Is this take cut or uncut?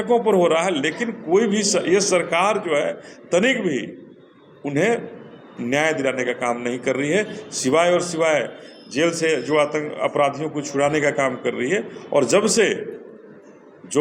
uncut